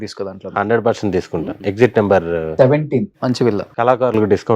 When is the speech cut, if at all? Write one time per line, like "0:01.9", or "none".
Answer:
0:01.5
0:03.7